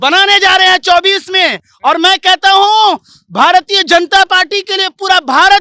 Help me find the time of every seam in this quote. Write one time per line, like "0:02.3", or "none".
none